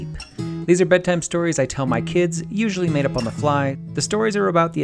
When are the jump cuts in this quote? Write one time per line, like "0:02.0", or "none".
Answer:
0:03.9

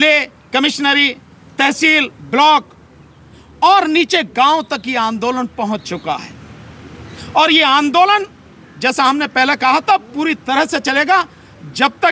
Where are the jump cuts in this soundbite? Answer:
none

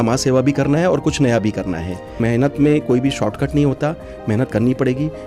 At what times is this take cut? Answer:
0:02.2

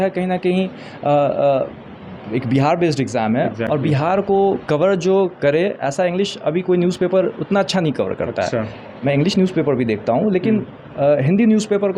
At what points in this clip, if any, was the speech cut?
none

